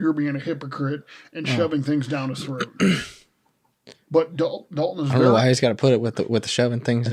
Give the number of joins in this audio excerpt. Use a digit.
0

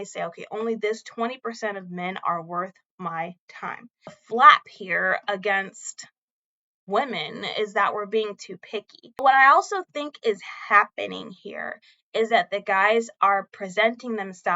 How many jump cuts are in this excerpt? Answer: 2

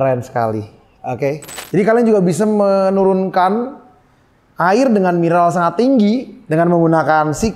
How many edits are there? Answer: 1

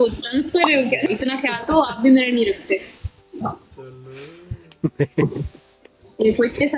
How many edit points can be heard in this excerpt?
1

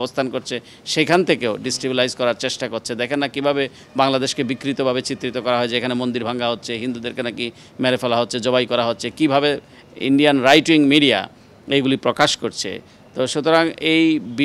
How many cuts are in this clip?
0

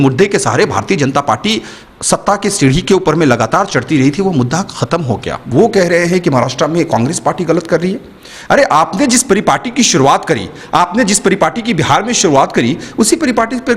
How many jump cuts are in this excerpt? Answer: 1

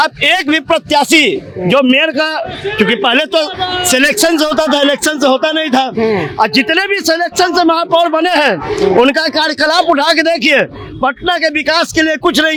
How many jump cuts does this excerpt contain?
0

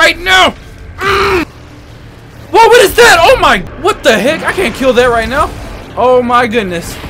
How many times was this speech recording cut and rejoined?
2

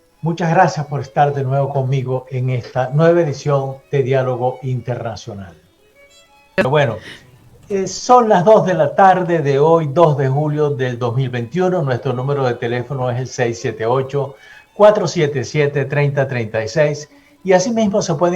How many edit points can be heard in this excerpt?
1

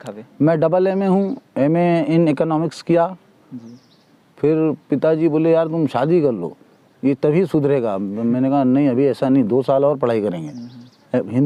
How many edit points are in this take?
0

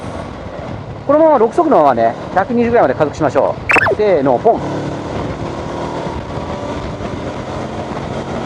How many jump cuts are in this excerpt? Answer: 1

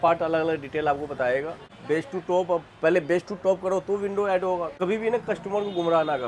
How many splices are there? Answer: 2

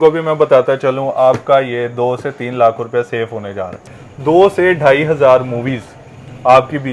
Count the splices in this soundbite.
1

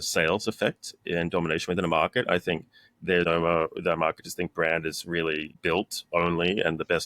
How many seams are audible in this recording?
2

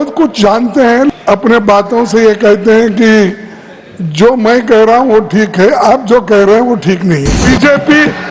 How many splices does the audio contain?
2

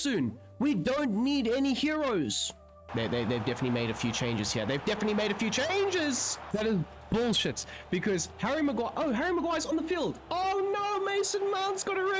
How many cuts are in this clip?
2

